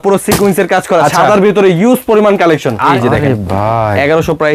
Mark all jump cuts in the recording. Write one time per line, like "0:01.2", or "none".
0:02.9